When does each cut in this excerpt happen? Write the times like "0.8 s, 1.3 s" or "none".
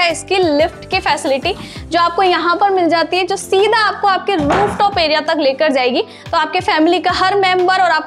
none